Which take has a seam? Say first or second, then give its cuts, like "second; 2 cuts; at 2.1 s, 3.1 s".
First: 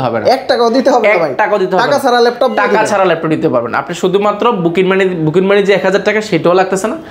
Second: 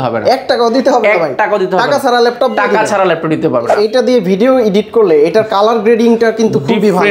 second; 1 cut; at 3.8 s